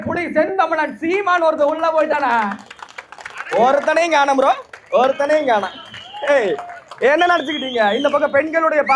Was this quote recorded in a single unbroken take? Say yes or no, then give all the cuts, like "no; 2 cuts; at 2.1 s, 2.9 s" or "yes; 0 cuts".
yes; 0 cuts